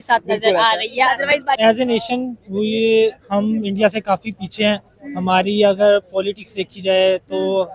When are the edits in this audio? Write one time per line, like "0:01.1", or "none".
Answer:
0:01.6